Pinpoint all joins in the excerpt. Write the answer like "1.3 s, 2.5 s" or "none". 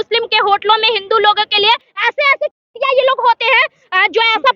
1.9 s